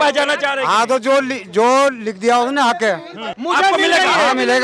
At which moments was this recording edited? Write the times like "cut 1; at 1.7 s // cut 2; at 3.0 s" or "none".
cut 1; at 3.4 s